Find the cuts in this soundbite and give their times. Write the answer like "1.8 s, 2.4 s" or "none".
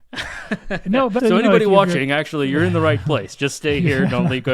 1.2 s